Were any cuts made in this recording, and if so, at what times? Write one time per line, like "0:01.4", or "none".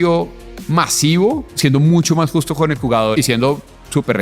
0:01.5
0:03.1

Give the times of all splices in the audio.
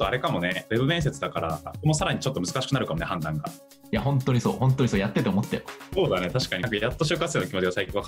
none

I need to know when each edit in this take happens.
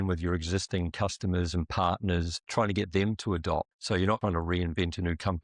0:04.2

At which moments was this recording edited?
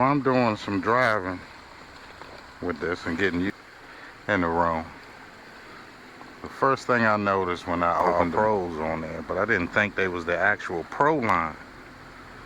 0:03.5
0:08.1

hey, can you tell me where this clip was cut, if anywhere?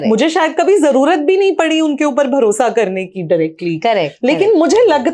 none

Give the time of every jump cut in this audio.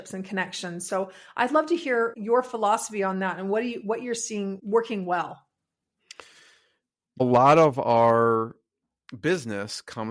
0:02.2
0:04.6
0:07.2

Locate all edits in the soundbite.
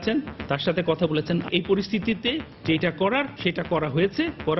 0:01.5
0:02.5
0:03.3

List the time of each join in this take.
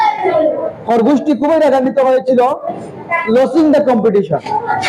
none

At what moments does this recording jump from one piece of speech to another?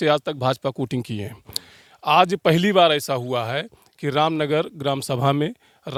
none

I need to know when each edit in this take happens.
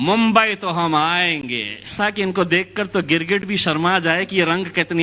0:01.9

